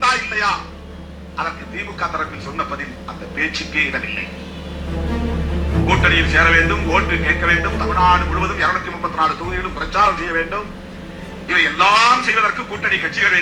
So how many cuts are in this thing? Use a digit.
0